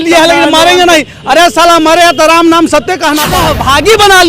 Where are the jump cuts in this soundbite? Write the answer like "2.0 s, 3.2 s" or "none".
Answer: 3.2 s